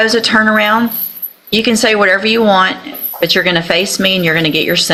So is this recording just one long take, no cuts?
yes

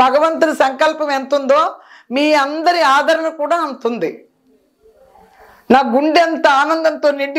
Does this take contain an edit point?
no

